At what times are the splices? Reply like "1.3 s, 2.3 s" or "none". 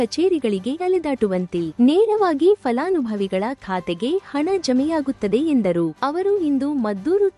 1.0 s, 6.0 s